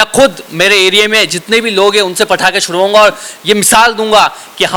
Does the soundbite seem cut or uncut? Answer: uncut